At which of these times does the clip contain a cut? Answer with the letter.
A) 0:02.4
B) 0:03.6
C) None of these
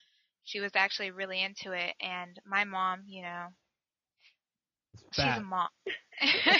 C